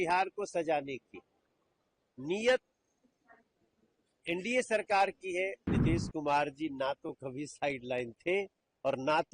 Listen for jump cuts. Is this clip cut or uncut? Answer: cut